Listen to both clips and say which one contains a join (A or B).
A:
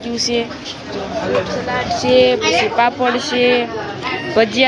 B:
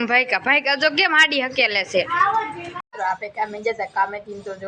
B